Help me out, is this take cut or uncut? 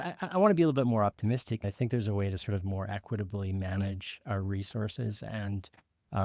cut